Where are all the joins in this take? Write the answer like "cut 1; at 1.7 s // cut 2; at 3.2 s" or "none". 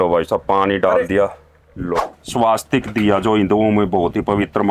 cut 1; at 1.9 s